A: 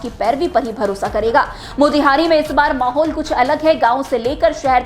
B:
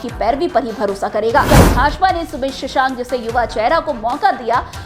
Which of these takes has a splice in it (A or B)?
B